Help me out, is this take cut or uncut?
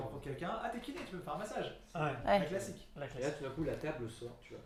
uncut